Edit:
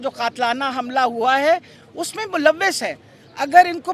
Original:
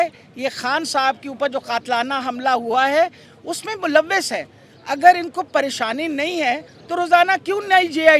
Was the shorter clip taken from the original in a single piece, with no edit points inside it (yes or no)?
yes